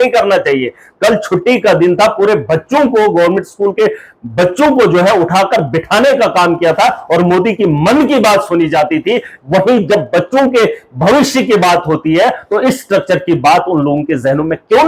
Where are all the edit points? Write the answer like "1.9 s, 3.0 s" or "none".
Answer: none